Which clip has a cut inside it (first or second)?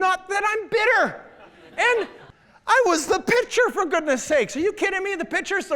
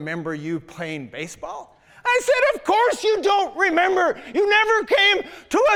first